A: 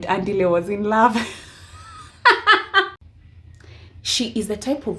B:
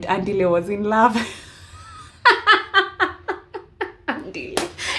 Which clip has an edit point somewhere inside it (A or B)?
A